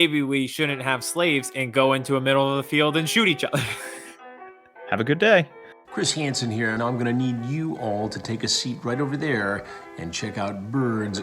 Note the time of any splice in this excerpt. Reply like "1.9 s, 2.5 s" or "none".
5.6 s